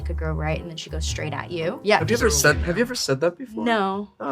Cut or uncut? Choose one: cut